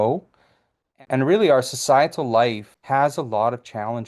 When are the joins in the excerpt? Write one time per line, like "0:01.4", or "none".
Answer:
0:01.0
0:02.7